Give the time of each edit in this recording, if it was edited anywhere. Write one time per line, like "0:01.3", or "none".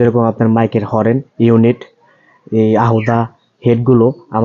none